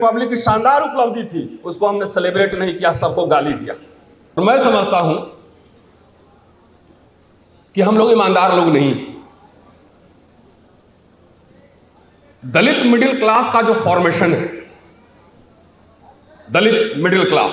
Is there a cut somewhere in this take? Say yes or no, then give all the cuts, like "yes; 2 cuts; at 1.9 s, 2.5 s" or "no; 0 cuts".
yes; 1 cut; at 4.4 s